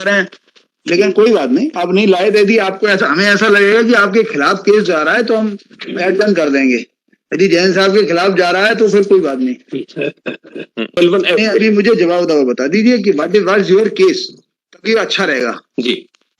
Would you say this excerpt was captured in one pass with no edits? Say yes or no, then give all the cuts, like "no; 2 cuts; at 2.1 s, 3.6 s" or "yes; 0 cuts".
no; 1 cut; at 11.0 s